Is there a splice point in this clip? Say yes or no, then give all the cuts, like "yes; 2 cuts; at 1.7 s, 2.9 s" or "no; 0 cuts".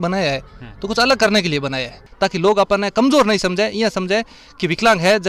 yes; 1 cut; at 2.0 s